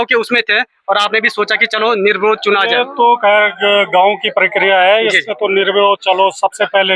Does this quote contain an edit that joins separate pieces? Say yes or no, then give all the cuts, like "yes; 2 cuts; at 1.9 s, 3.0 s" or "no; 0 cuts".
no; 0 cuts